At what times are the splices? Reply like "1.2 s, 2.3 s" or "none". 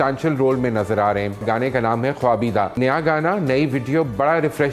1.4 s, 2.8 s

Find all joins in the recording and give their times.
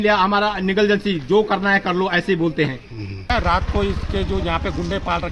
3.3 s

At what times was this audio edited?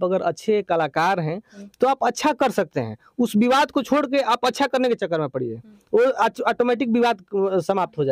none

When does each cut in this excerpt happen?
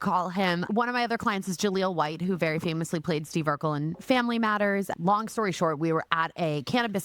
4.9 s

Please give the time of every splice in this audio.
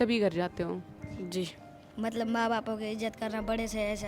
1.8 s

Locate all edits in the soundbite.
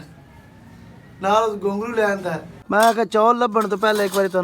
2.5 s

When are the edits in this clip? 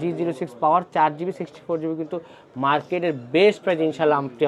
none

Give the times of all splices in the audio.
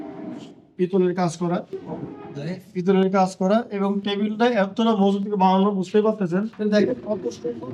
6.5 s

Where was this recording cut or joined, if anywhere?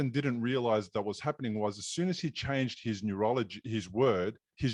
none

